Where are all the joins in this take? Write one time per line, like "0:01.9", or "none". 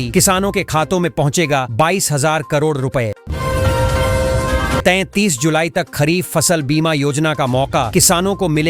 0:03.3
0:04.8